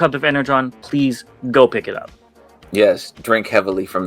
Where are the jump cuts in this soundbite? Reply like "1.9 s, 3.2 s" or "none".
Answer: none